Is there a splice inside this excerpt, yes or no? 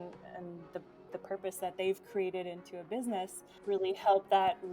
yes